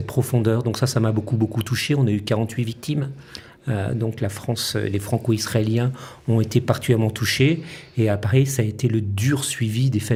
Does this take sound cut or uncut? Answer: uncut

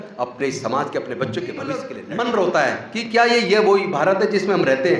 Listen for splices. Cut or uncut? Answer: cut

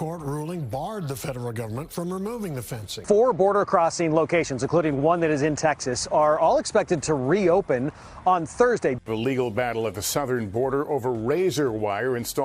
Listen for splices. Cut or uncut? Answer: cut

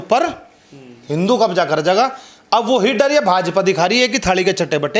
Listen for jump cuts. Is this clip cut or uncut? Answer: uncut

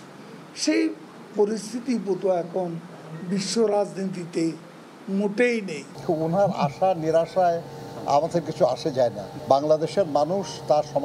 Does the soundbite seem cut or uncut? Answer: cut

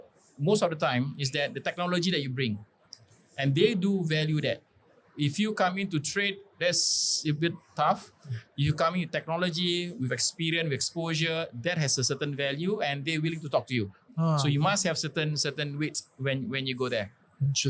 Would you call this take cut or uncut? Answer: uncut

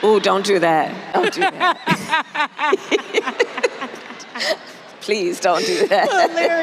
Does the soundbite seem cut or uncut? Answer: uncut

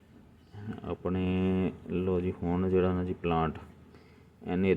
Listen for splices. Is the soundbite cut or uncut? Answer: uncut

